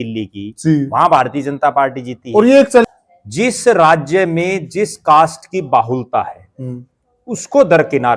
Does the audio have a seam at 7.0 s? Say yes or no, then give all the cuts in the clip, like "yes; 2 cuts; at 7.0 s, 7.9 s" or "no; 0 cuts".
no; 1 cut; at 2.9 s